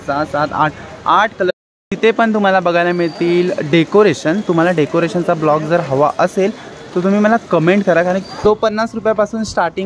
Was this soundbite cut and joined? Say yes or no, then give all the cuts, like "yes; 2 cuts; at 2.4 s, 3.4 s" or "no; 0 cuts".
yes; 2 cuts; at 1.5 s, 8.3 s